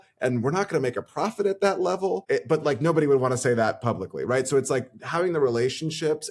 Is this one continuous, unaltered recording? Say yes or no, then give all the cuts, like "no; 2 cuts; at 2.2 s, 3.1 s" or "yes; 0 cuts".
no; 1 cut; at 2.2 s